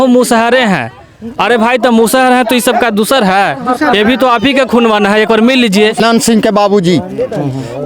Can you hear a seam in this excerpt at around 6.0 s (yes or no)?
yes